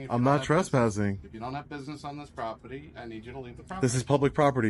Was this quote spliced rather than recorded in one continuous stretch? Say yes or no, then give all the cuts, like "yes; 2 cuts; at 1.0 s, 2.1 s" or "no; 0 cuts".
no; 0 cuts